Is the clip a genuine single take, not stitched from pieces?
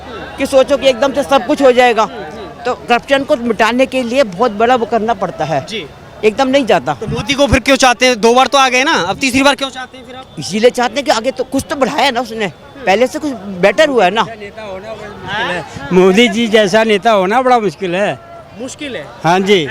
yes; 0 cuts

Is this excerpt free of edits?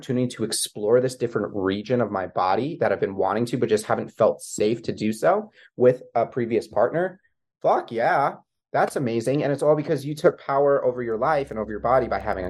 yes; 0 cuts

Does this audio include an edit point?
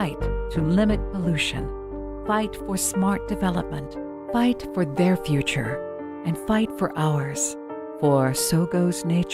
yes; 1 cut; at 5.1 s

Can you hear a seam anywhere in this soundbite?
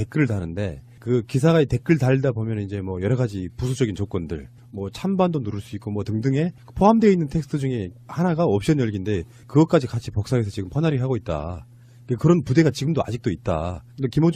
no; 0 cuts

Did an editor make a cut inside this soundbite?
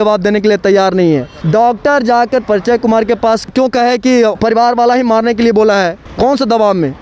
yes; 2 cuts; at 1.3 s, 6.0 s

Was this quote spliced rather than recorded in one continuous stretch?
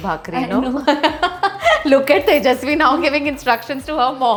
no; 0 cuts

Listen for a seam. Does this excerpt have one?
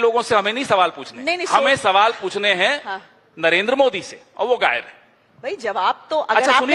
no; 0 cuts

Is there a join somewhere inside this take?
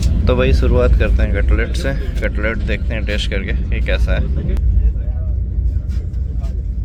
no; 0 cuts

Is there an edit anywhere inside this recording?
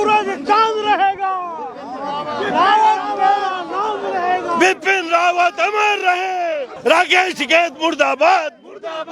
yes; 1 cut; at 6.7 s

